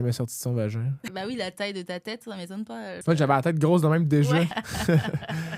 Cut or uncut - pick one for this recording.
cut